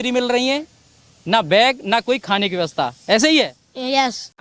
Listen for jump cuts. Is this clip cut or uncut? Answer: uncut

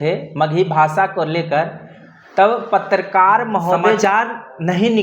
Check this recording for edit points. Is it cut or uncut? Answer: cut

